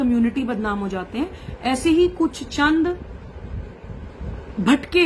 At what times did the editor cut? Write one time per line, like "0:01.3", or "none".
none